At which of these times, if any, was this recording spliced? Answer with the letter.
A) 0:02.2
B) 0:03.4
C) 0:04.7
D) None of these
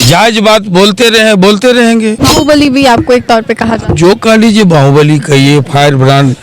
A